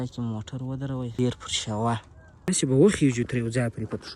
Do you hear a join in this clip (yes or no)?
yes